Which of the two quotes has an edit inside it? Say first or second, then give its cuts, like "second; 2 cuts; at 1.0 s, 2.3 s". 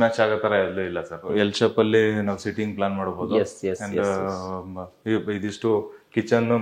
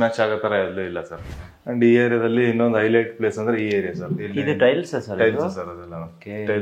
second; 2 cuts; at 1.2 s, 4.2 s